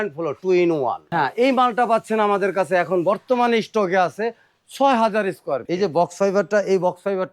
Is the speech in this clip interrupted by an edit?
yes; 2 cuts; at 1.0 s, 5.6 s

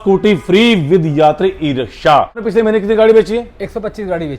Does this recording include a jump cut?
yes; 1 cut; at 2.4 s

